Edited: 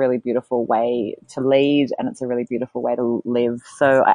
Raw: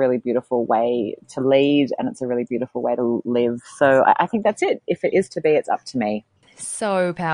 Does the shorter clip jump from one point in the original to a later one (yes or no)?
no